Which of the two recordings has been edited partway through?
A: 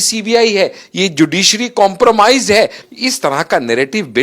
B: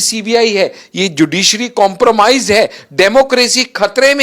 A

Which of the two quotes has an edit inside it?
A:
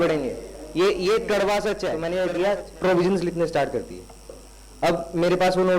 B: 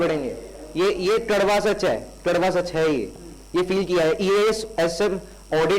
A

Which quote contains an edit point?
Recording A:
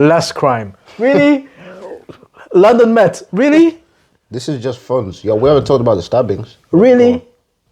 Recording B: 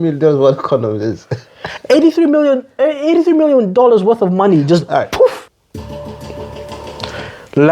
B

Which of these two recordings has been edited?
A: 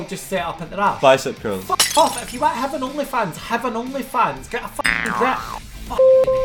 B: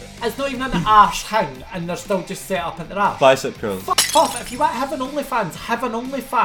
A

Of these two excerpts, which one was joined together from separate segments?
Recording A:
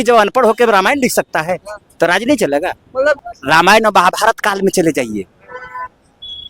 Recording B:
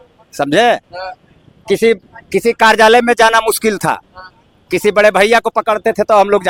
A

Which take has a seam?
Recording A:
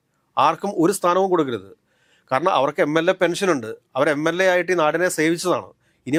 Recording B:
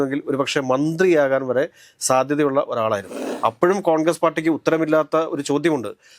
B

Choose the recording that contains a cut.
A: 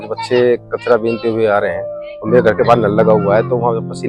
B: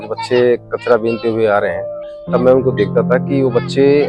B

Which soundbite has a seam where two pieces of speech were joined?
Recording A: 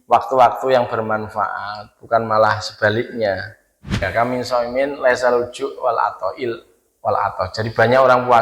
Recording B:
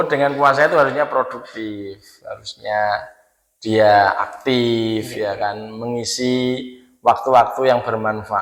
A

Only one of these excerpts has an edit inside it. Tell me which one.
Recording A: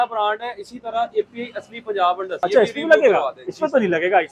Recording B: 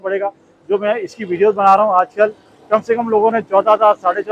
A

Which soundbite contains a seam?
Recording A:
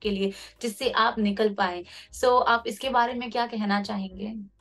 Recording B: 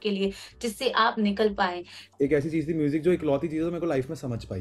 B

